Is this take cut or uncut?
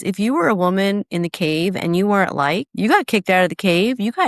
cut